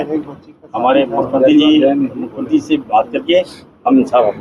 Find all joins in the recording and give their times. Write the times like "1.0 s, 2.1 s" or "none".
none